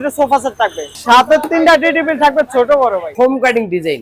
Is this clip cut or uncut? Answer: cut